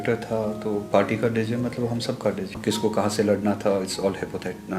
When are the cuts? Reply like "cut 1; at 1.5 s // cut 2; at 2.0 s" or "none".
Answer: cut 1; at 2.6 s

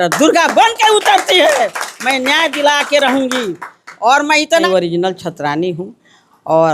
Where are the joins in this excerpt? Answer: cut 1; at 4.6 s

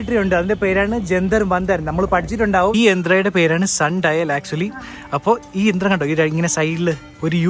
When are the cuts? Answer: cut 1; at 2.7 s

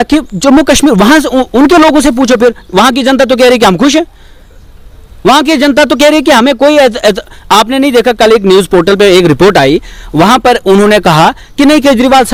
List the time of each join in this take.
none

